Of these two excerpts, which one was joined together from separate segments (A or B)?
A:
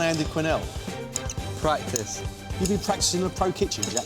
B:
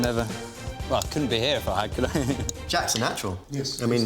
B